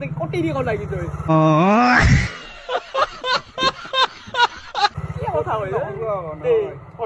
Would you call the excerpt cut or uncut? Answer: uncut